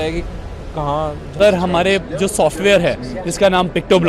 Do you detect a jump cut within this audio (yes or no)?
yes